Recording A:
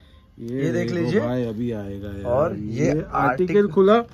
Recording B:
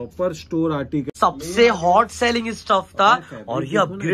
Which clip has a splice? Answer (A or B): B